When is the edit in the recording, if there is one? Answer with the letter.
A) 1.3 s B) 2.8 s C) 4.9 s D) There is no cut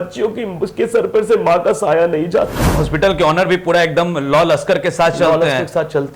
B